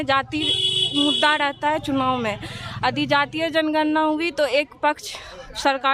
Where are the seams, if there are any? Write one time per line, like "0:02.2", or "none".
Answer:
none